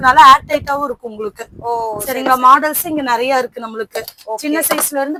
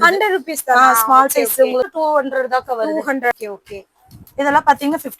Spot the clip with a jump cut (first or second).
second